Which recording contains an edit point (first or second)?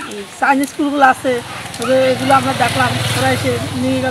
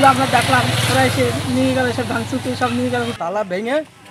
second